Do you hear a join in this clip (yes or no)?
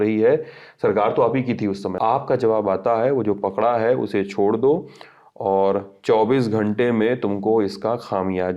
yes